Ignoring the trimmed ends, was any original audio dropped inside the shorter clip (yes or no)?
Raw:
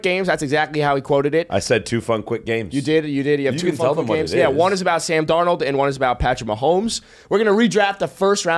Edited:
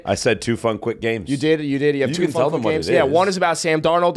no